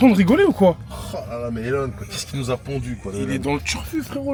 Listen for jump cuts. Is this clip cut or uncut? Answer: uncut